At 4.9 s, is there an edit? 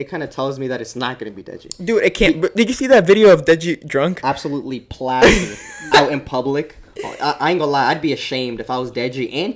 no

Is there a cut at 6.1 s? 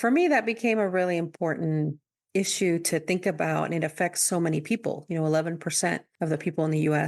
yes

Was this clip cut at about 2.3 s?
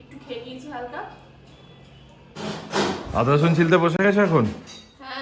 yes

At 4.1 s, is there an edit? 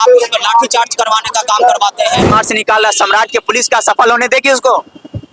no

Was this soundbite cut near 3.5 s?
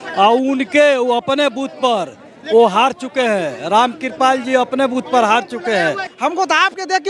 no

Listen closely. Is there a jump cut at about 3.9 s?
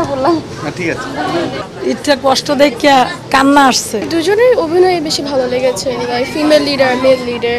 yes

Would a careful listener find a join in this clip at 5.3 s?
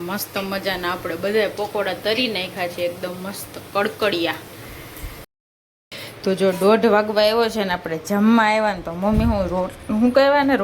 yes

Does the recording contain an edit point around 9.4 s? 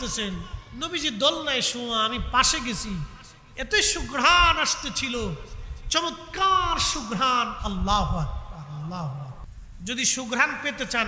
yes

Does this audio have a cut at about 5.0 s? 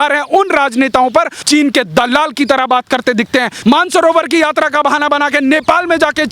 no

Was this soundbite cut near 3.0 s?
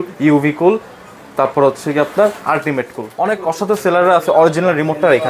yes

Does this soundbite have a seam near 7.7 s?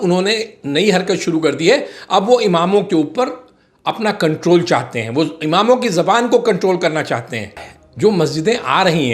yes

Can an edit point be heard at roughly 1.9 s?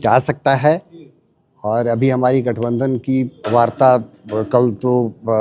no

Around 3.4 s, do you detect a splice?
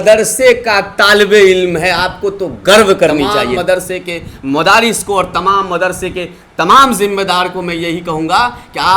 yes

